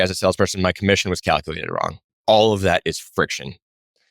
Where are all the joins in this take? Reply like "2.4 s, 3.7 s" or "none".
2.2 s